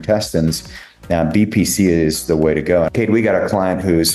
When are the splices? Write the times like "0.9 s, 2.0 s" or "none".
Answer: 2.9 s